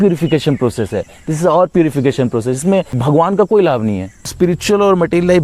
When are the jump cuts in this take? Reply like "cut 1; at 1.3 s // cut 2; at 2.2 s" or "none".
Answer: cut 1; at 3.0 s // cut 2; at 4.3 s